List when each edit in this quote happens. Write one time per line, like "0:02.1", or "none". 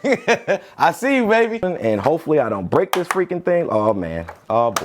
0:01.6